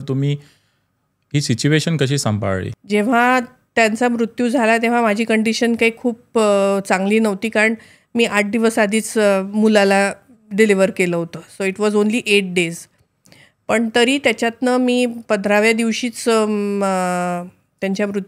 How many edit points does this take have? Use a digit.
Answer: 1